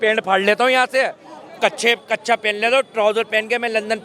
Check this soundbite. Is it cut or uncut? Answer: uncut